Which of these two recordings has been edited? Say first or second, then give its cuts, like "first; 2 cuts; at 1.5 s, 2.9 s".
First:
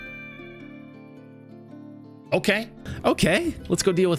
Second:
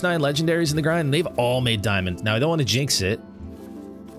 first; 1 cut; at 2.8 s